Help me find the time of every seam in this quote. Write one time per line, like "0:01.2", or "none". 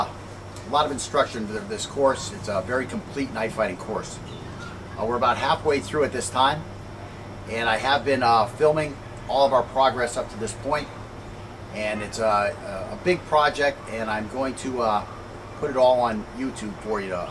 0:12.2